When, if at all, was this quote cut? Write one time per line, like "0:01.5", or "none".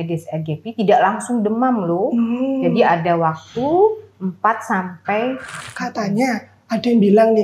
0:05.7